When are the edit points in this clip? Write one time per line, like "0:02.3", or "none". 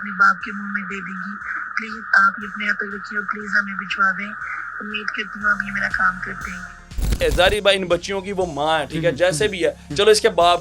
0:07.2